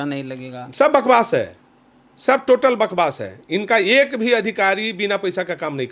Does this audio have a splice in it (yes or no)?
no